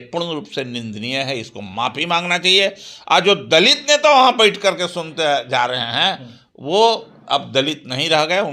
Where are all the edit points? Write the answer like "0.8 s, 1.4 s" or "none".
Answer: none